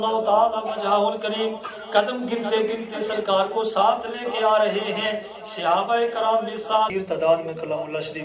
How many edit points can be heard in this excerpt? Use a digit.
1